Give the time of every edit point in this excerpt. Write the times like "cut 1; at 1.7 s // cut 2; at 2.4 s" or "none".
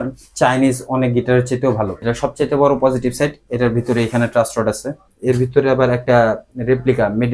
cut 1; at 2.0 s // cut 2; at 5.1 s